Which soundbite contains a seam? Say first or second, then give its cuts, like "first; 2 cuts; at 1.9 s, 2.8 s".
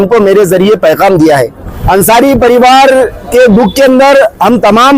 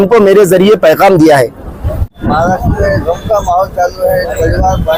first; 1 cut; at 1.7 s